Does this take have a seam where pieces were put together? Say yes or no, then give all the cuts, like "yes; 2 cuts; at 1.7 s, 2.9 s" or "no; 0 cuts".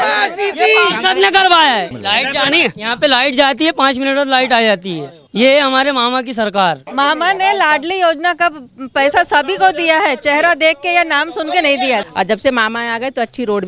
yes; 4 cuts; at 2.0 s, 5.2 s, 6.8 s, 12.0 s